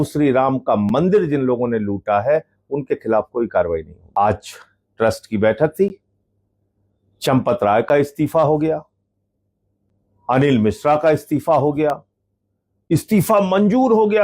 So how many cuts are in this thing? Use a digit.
1